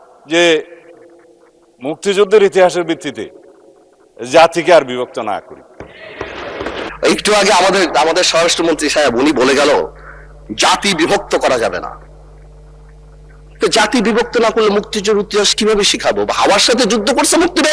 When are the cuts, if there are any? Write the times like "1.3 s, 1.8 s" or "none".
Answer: none